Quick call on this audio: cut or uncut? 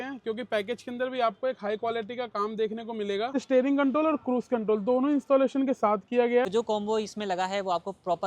cut